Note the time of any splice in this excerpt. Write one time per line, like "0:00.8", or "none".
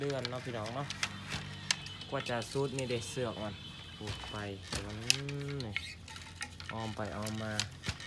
none